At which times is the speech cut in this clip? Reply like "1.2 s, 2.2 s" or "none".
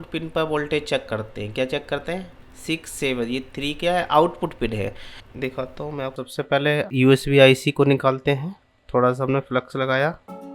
6.2 s